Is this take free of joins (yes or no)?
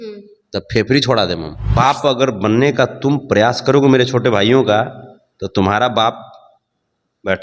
no